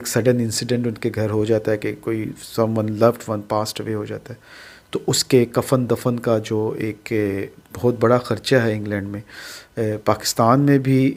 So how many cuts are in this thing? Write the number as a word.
zero